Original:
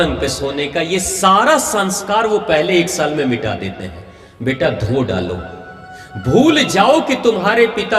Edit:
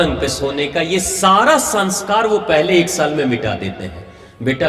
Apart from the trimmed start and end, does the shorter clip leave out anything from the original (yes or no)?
no